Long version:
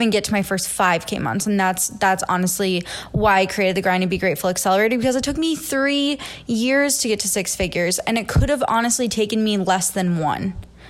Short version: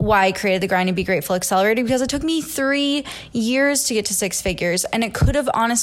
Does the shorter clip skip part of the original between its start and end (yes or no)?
no